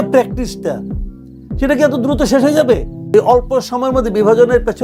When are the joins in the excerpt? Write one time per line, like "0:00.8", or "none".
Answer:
0:02.9